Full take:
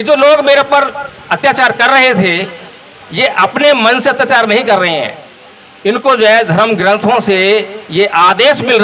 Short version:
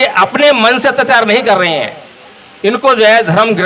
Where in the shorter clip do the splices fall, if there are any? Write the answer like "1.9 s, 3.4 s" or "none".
none